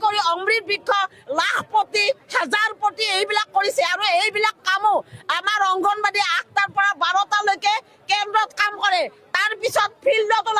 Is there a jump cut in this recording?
no; 0 cuts

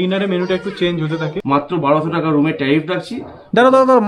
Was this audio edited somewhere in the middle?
yes; 1 cut; at 1.4 s

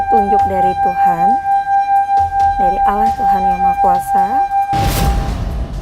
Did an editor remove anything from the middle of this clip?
yes; 1 cut; at 4.9 s

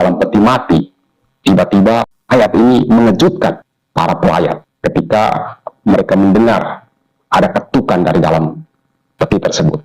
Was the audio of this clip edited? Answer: yes; 3 cuts; at 2.1 s, 3.7 s, 4.7 s

